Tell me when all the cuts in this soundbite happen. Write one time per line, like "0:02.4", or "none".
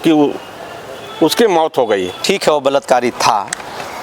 0:02.2